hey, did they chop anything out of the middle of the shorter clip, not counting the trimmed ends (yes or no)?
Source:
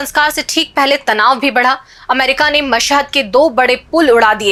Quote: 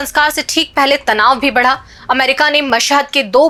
no